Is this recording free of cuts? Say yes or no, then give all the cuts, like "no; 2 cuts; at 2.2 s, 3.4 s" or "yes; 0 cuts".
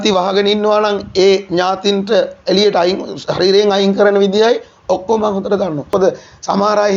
no; 1 cut; at 5.9 s